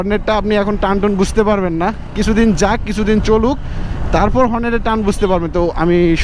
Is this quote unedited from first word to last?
yes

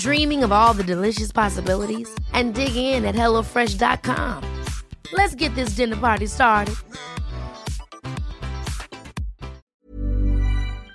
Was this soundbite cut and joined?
yes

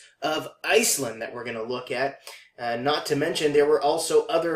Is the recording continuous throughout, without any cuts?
no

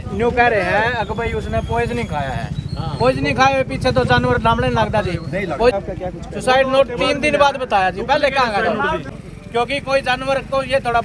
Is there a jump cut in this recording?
yes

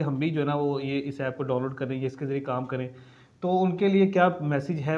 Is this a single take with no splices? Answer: yes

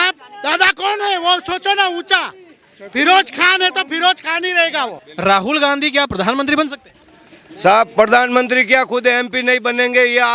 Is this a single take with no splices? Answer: no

